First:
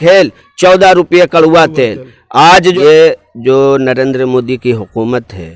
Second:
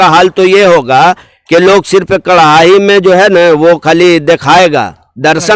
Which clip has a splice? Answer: first; 1 cut; at 2.8 s

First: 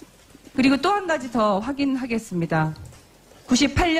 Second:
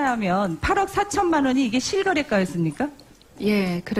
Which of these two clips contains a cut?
first; 1 cut; at 2.8 s

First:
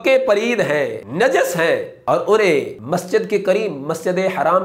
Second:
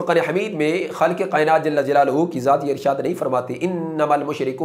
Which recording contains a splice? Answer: first; 3 cuts; at 1.0 s, 1.9 s, 2.8 s

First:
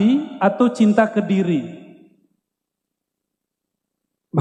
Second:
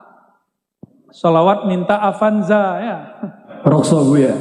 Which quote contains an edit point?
second; 1 cut; at 3.5 s

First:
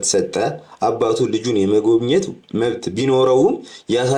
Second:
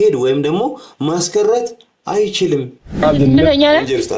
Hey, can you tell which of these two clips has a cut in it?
second; 1 cut; at 3.0 s

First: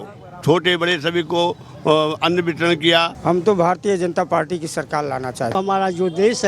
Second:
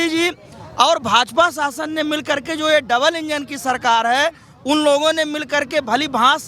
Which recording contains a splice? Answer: first; 2 cuts; at 3.1 s, 5.5 s

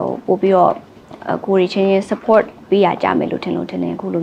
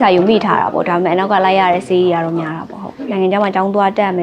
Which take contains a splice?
second; 1 cut; at 3.1 s

